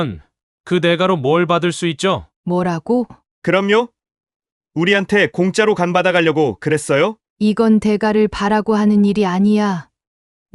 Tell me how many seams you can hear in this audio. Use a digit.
3